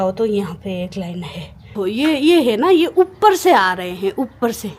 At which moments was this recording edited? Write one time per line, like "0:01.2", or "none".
0:01.7